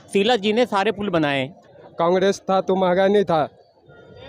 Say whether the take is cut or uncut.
cut